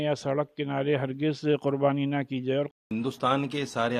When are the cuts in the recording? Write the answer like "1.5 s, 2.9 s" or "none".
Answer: 2.8 s